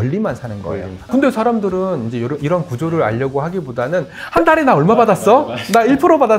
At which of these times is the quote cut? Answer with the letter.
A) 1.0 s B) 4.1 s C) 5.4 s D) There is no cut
A